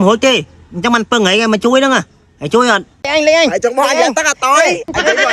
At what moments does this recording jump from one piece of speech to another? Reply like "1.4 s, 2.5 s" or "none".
3.0 s